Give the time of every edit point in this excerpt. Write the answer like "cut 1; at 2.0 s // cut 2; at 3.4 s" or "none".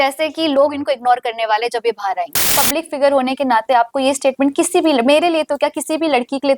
cut 1; at 2.5 s